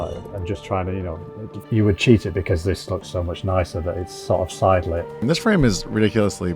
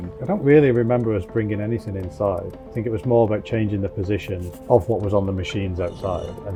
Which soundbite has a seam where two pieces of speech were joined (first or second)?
first